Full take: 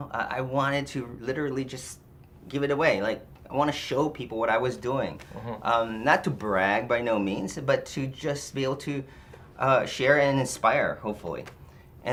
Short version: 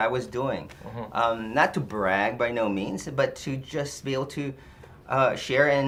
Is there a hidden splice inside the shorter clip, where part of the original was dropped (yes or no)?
no